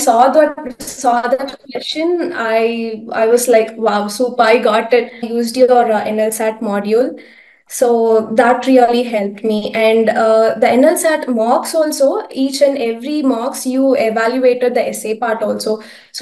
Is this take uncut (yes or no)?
no